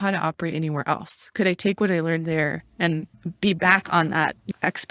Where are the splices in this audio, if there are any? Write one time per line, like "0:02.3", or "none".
0:03.1